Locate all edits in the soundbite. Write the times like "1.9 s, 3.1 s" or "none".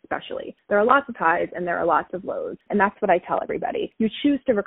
2.6 s